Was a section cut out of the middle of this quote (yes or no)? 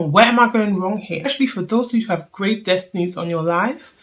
yes